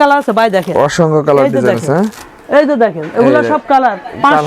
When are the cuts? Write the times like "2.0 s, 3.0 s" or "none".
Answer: none

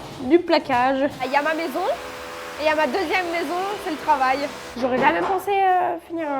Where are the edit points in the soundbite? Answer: 1.2 s, 4.6 s

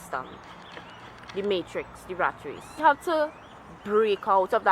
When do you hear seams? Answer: 2.8 s

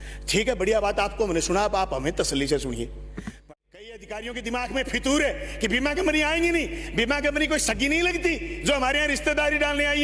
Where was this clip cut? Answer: 3.4 s

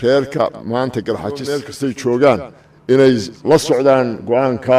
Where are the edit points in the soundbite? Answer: 1.7 s

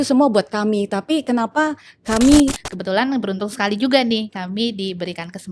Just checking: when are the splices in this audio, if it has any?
2.7 s

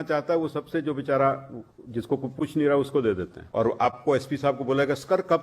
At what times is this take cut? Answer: 3.4 s

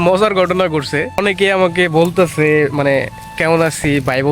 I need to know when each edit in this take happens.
1.2 s

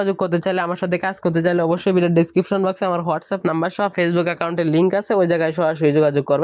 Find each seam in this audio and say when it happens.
none

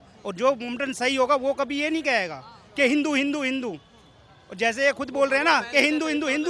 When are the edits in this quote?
none

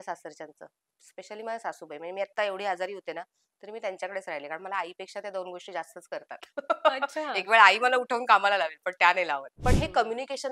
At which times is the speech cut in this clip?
9.5 s

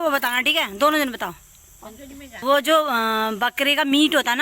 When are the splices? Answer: 2.4 s

